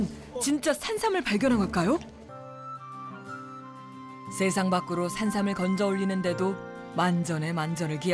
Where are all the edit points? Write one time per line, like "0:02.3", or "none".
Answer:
0:02.2